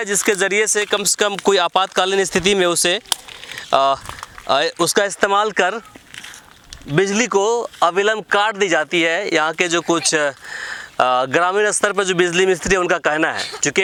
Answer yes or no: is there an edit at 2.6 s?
no